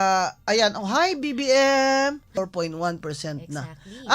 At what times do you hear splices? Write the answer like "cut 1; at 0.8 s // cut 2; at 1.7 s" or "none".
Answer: cut 1; at 2.3 s